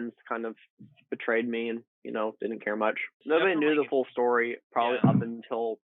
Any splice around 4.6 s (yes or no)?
no